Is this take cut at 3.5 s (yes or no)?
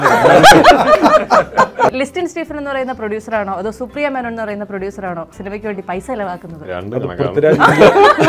no